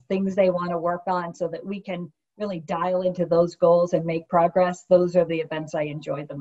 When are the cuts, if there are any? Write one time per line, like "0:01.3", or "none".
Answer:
none